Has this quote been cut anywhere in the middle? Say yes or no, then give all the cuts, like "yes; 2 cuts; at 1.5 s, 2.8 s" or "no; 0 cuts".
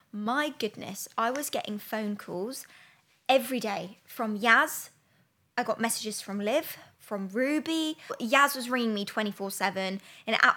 yes; 1 cut; at 8.2 s